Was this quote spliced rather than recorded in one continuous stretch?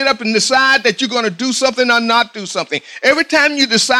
no; 0 cuts

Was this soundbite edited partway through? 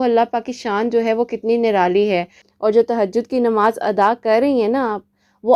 yes; 1 cut; at 2.4 s

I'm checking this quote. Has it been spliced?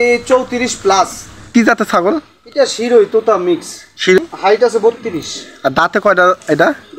yes; 2 cuts; at 1.5 s, 4.2 s

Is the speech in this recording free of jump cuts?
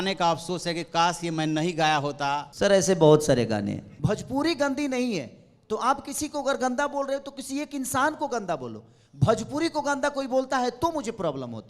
no; 2 cuts; at 2.5 s, 3.9 s

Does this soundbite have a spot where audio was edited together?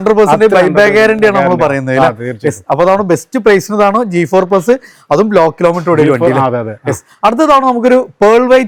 no; 0 cuts

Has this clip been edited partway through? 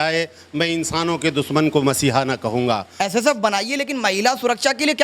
yes; 1 cut; at 2.9 s

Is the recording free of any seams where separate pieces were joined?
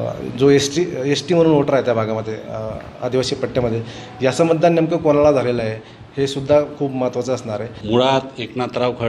no; 1 cut; at 7.7 s

